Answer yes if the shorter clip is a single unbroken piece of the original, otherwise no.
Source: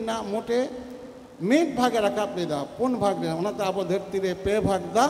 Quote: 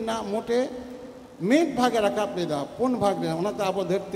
yes